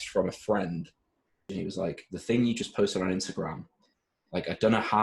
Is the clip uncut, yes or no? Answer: no